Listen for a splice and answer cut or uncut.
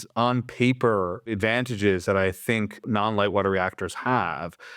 cut